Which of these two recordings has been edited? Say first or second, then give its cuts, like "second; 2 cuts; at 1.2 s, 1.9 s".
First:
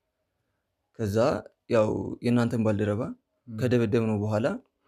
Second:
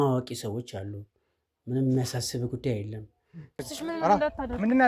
second; 1 cut; at 3.6 s